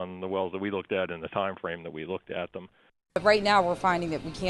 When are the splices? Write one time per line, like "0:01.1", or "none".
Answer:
0:02.9

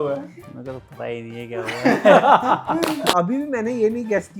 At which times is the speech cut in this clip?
0:03.1

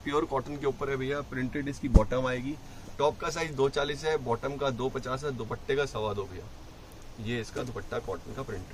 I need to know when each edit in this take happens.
none

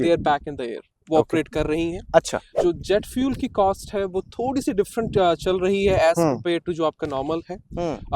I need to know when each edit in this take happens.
0:02.5

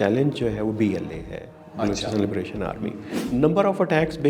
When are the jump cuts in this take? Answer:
0:03.1

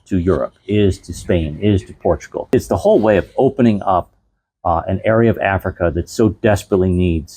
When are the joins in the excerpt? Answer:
0:02.5

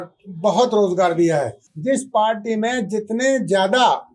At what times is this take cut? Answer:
0:01.7

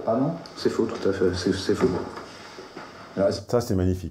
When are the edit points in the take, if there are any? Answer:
none

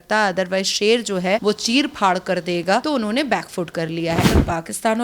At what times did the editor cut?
0:01.4
0:02.8
0:04.3

